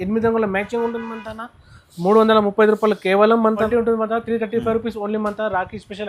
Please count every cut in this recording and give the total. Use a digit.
1